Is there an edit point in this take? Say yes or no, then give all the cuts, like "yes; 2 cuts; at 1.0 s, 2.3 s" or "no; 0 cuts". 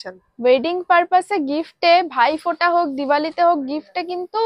no; 0 cuts